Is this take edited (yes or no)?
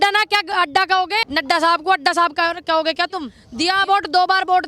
yes